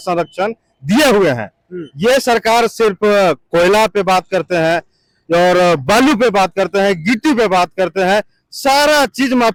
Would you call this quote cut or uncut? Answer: uncut